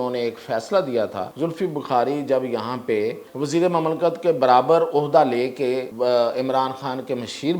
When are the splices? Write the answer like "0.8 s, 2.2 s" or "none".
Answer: 1.2 s, 3.2 s, 5.9 s